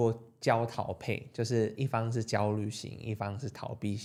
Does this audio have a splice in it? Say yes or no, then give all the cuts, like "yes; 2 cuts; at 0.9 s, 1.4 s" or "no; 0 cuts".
no; 0 cuts